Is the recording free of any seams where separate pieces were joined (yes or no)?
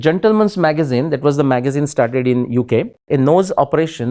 no